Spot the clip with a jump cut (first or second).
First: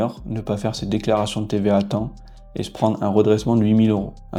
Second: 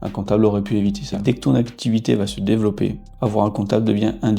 second